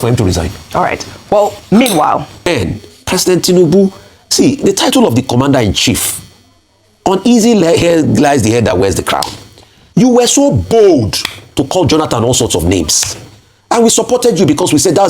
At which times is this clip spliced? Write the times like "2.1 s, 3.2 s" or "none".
2.4 s